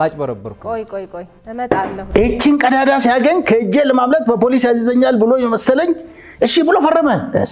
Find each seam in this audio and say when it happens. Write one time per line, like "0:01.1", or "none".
none